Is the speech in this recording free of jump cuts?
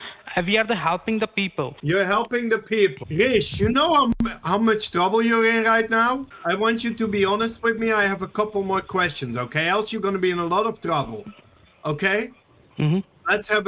no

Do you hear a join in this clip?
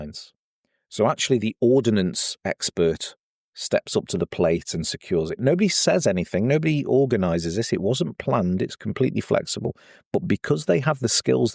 no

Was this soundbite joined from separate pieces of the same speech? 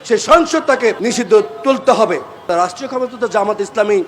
yes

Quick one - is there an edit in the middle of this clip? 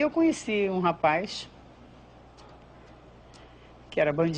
no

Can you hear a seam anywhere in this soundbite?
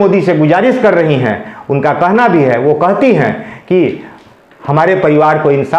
no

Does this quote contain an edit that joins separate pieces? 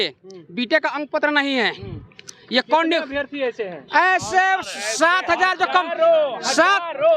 no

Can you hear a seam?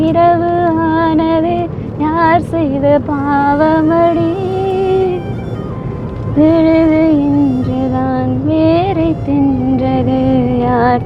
no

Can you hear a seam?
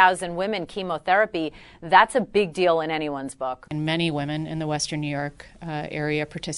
yes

